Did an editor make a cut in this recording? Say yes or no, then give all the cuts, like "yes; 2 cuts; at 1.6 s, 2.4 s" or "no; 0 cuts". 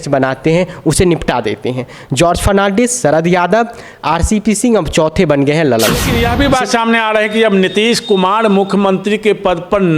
yes; 1 cut; at 6.1 s